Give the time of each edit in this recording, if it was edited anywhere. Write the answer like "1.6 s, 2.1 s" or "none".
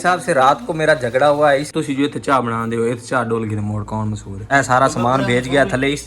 1.7 s, 4.5 s